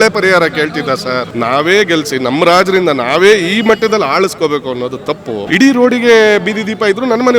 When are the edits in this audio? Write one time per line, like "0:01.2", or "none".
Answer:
0:01.3
0:05.4